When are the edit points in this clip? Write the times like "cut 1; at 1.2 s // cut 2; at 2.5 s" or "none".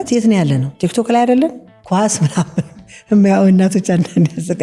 cut 1; at 1.7 s